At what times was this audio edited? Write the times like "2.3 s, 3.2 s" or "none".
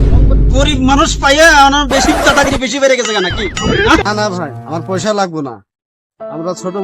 4.0 s